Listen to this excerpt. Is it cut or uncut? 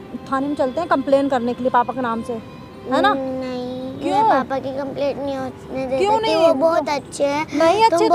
uncut